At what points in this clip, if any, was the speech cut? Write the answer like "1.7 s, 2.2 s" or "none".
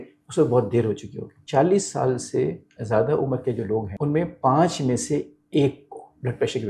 1.3 s, 3.9 s